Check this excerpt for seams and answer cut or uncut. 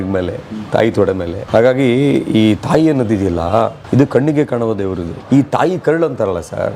cut